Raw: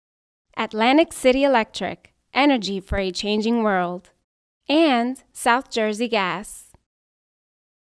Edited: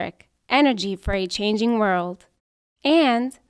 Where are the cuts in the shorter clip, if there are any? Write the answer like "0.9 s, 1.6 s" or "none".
none